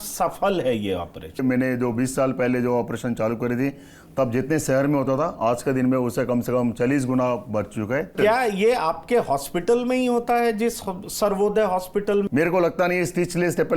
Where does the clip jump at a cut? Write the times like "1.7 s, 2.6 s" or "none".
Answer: 1.4 s, 8.1 s, 12.3 s